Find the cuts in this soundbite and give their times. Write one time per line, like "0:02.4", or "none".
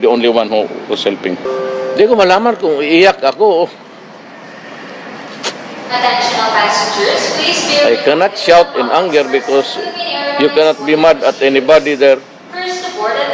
0:01.0

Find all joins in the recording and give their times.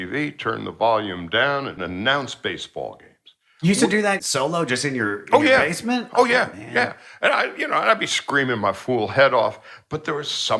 0:01.8
0:04.2

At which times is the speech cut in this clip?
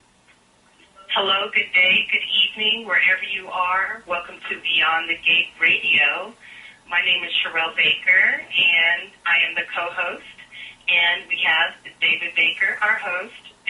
none

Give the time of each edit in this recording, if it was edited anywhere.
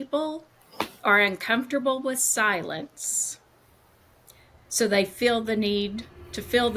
none

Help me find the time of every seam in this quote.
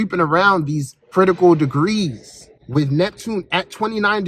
0:01.1
0:02.6

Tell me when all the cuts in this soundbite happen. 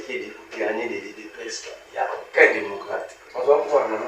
0:03.2

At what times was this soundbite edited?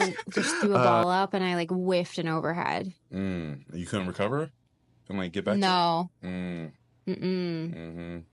none

